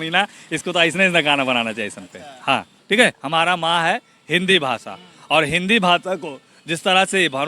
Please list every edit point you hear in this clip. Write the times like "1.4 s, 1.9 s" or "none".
2.7 s